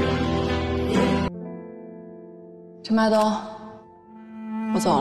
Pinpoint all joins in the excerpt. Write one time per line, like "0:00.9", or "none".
0:01.3